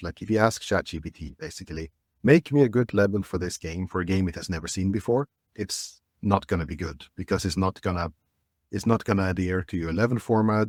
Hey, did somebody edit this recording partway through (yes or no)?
no